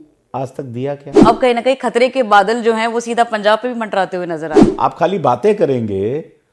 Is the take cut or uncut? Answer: cut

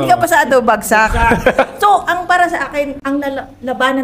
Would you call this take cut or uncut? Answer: uncut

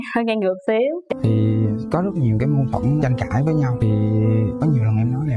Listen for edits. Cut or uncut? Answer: cut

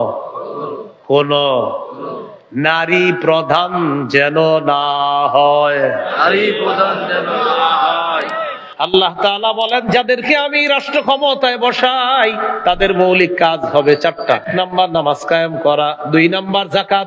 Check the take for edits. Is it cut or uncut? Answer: cut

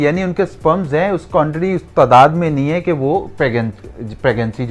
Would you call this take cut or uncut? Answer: uncut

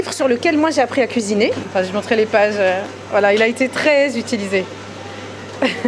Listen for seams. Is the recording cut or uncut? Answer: cut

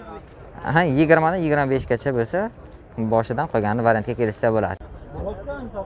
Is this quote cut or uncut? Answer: cut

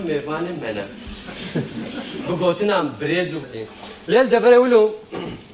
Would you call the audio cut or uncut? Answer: uncut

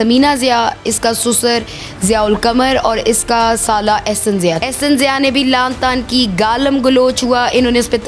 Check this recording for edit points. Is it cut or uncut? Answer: cut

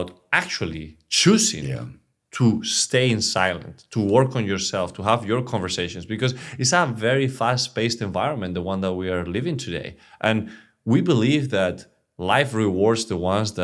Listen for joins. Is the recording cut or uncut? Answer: uncut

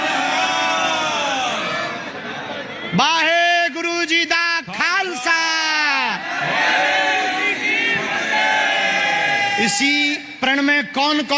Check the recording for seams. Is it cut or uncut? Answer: uncut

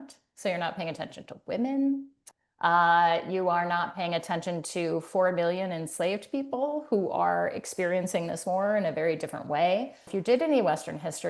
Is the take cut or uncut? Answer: cut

